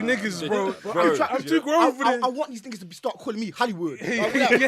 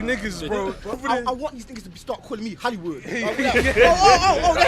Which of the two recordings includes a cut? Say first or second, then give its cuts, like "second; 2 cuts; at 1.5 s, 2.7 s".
second; 1 cut; at 1.0 s